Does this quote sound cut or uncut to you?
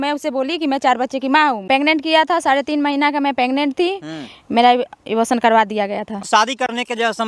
cut